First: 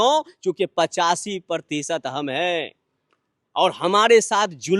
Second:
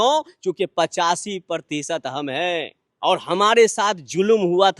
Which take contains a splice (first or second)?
second